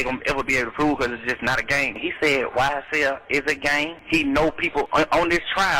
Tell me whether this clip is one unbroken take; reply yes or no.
no